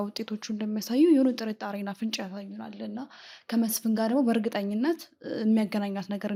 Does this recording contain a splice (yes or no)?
no